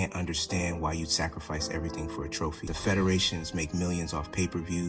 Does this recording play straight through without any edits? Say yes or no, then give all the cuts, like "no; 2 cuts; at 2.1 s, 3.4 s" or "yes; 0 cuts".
no; 1 cut; at 2.6 s